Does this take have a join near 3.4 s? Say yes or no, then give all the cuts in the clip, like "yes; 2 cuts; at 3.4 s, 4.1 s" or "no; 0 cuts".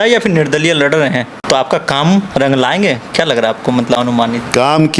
no; 1 cut; at 1.4 s